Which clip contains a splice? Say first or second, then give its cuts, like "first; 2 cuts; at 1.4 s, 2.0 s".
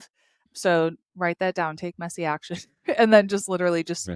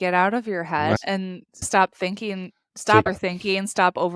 second; 2 cuts; at 1.0 s, 3.1 s